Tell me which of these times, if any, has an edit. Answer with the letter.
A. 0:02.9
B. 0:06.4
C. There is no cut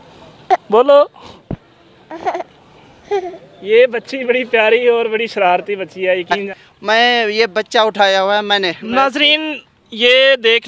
B